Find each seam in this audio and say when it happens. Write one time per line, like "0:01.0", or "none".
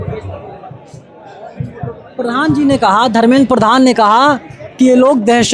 none